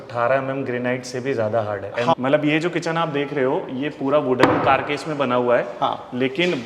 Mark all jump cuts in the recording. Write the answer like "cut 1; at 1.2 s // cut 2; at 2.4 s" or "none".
cut 1; at 2.1 s